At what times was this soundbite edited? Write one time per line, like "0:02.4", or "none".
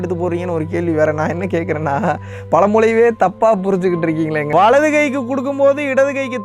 0:04.4